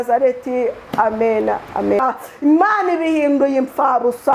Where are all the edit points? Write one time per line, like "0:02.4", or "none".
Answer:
0:02.0